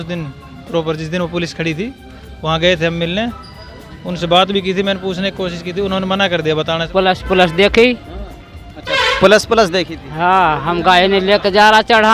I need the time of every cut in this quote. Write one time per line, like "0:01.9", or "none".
0:06.8